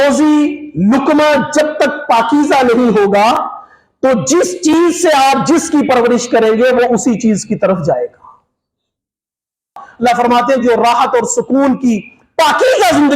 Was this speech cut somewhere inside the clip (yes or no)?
yes